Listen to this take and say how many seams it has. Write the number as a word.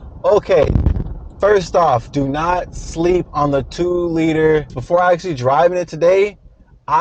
one